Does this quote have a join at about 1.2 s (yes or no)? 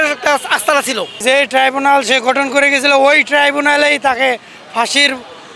yes